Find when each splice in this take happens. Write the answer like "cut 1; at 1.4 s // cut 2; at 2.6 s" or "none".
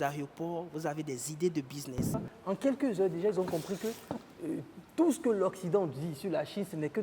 cut 1; at 2.2 s